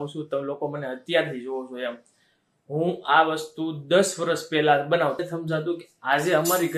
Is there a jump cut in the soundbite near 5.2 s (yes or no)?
yes